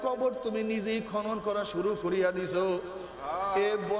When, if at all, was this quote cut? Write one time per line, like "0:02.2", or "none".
none